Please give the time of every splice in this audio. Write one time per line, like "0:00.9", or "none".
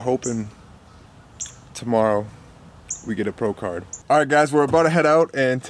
0:03.9